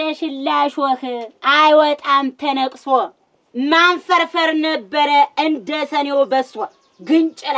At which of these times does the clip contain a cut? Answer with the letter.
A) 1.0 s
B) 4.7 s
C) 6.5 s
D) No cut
D